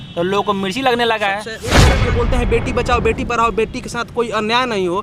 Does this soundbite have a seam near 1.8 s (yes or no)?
yes